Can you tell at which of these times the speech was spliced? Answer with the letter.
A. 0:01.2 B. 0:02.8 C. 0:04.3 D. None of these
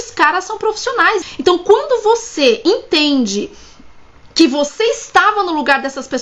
A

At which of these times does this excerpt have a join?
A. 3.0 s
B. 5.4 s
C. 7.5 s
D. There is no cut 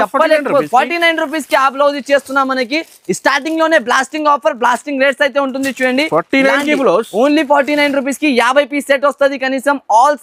D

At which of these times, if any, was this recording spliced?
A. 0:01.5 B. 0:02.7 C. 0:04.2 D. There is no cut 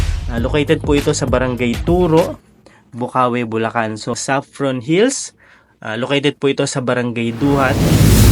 C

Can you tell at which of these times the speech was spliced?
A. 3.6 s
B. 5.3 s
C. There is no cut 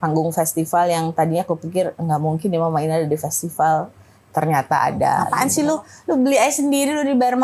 B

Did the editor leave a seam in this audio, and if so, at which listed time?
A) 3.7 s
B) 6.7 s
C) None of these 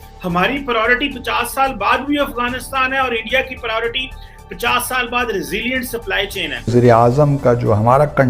B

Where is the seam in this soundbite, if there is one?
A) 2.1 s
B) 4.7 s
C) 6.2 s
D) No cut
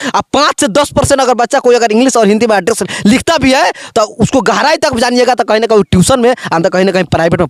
D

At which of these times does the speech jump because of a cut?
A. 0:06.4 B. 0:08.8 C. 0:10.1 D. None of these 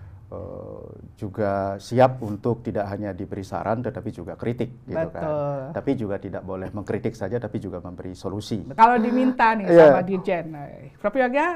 B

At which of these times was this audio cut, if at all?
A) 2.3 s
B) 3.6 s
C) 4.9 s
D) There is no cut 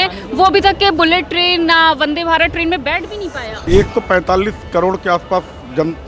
B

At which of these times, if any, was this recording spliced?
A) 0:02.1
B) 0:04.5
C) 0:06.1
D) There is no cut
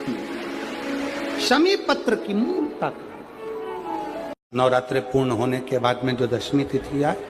B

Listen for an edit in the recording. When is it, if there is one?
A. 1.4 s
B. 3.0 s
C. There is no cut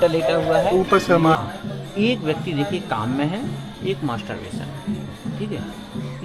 A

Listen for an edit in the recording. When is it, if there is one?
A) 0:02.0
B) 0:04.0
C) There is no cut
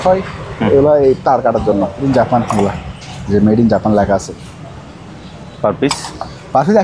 A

